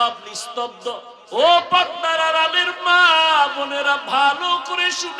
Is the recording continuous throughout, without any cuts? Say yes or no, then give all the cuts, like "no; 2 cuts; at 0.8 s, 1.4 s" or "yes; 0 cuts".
no; 1 cut; at 1.1 s